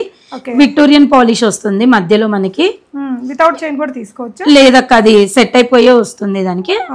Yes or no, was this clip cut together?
no